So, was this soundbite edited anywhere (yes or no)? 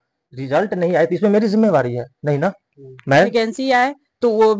yes